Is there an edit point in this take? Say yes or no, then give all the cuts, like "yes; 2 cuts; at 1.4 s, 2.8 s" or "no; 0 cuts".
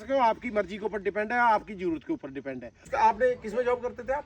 yes; 1 cut; at 2.8 s